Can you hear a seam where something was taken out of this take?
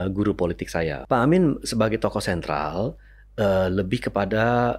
yes; 1 cut; at 1.0 s

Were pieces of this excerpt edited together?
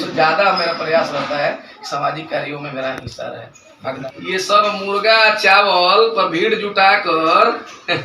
yes; 1 cut; at 4.0 s

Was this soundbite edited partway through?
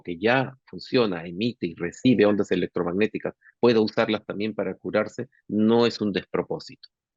no; 0 cuts

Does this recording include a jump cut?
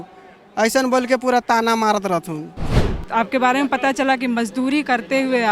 yes; 1 cut; at 2.9 s

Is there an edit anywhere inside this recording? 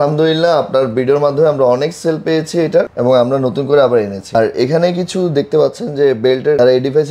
no; 0 cuts

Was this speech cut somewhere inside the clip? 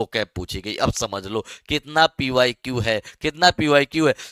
no; 0 cuts

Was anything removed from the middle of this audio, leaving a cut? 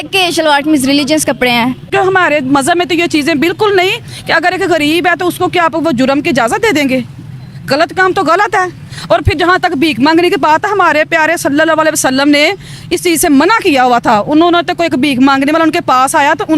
yes; 1 cut; at 1.9 s

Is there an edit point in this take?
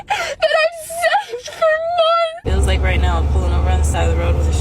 yes; 1 cut; at 2.4 s

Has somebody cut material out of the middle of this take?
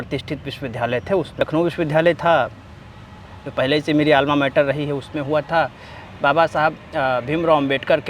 yes; 1 cut; at 1.4 s

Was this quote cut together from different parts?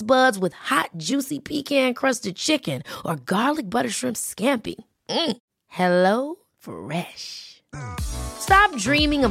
no; 0 cuts

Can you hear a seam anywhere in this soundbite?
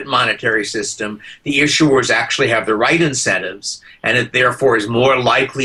no; 0 cuts

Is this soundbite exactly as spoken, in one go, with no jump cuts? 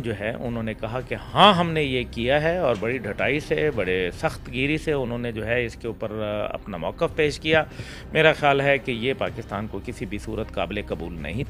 yes; 0 cuts

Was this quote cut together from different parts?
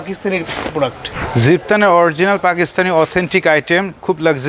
yes; 1 cut; at 1.2 s

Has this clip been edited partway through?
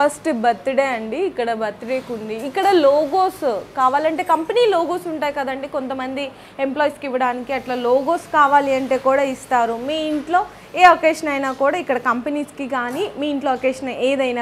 no; 0 cuts

